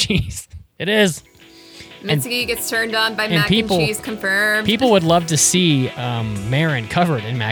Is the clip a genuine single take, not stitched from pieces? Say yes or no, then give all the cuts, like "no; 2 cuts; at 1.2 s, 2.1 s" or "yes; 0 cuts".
yes; 0 cuts